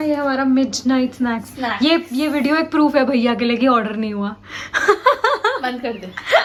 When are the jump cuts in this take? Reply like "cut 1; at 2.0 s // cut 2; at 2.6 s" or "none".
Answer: none